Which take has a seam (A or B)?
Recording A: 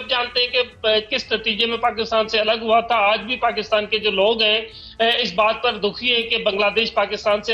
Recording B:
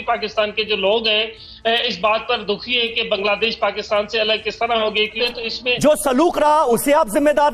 B